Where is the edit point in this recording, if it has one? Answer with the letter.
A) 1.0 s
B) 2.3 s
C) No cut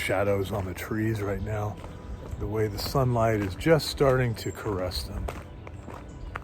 B